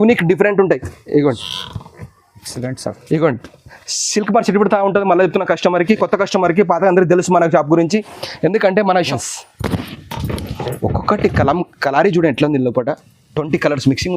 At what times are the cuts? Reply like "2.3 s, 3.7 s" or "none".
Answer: 9.1 s